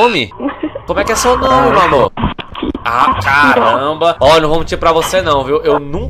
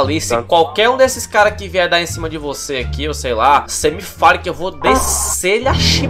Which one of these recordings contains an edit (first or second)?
first